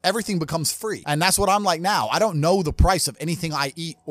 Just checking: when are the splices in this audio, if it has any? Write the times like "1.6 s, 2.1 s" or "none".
1.0 s